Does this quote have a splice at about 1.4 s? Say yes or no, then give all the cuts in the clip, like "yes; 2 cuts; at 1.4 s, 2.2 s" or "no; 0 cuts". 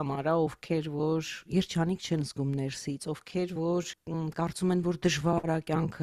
no; 1 cut; at 4.0 s